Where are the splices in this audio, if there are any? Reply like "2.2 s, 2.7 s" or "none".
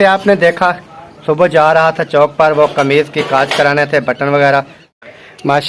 4.8 s